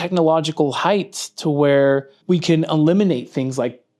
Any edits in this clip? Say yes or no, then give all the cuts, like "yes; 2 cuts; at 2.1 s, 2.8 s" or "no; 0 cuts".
yes; 1 cut; at 2.1 s